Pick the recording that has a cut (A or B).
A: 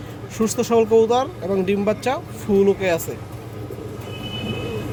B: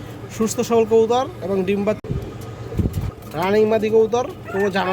B